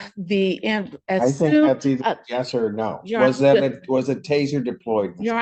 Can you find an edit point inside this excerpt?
no; 0 cuts

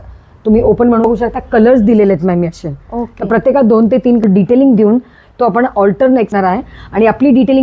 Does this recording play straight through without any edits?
no; 3 cuts; at 1.0 s, 4.2 s, 6.3 s

